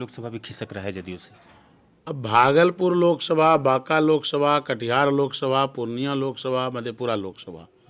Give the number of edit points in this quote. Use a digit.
0